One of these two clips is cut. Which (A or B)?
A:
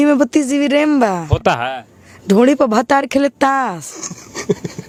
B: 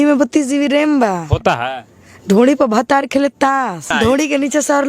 B